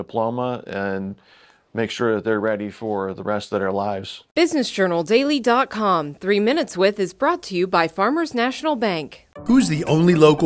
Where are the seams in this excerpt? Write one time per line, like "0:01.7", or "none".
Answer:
0:04.1